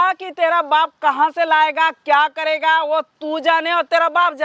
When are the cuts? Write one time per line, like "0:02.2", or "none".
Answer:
none